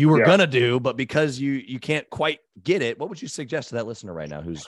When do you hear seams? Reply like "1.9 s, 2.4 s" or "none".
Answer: none